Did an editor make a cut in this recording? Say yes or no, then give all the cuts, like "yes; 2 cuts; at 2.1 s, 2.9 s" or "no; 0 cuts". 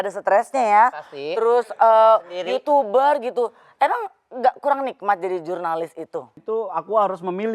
yes; 1 cut; at 6.3 s